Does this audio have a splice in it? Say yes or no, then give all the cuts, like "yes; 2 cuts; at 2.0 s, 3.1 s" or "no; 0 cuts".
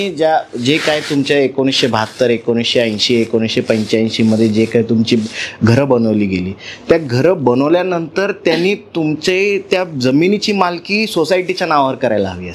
no; 0 cuts